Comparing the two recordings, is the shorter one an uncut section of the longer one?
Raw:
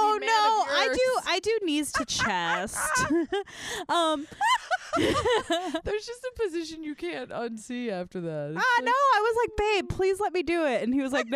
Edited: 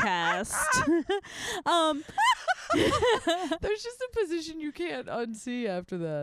yes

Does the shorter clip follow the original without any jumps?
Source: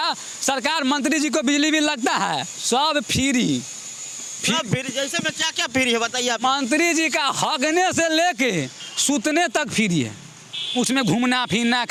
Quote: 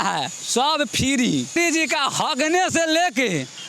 no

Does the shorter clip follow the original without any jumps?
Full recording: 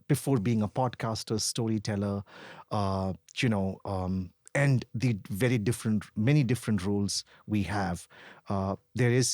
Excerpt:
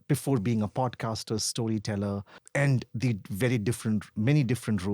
no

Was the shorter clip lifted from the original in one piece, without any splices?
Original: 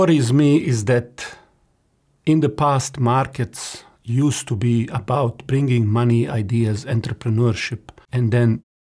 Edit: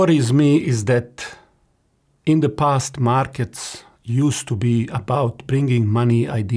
yes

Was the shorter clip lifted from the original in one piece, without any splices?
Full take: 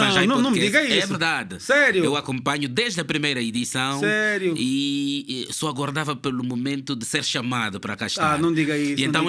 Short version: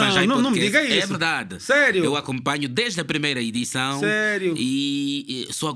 yes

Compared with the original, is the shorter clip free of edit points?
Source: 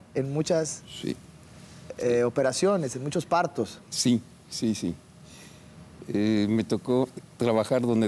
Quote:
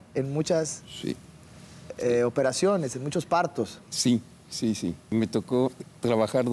no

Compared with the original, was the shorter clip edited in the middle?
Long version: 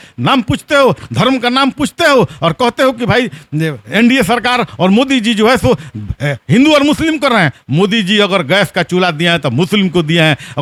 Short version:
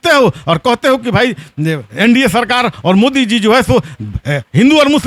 no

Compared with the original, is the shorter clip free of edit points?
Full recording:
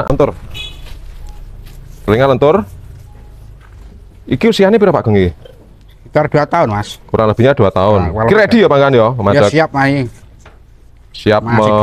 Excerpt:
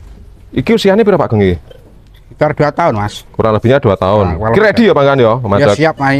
yes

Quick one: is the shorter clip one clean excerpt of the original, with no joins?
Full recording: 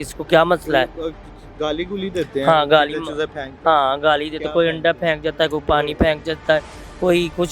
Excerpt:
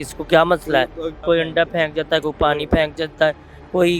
no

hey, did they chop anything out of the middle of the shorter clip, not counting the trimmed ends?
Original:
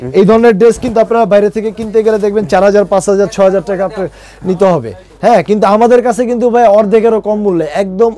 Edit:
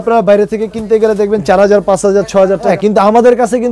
yes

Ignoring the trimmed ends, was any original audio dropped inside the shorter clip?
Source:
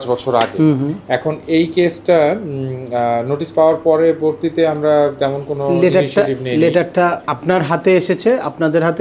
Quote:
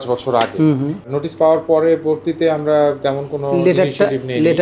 yes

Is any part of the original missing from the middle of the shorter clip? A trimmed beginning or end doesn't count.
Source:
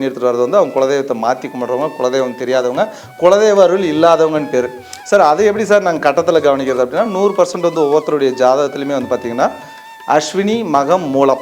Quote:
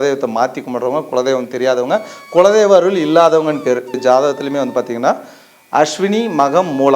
yes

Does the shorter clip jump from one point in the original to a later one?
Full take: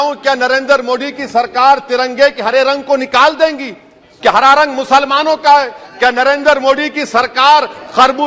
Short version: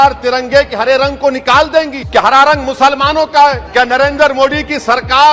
yes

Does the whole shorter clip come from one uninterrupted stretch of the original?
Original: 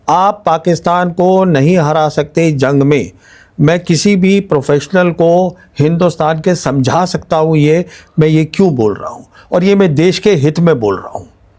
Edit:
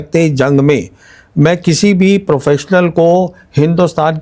yes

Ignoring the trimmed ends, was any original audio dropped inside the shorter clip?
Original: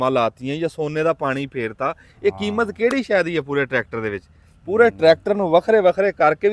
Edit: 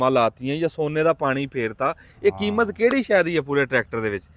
no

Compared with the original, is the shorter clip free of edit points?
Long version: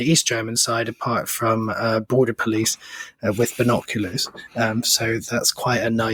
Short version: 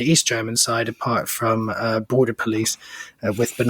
yes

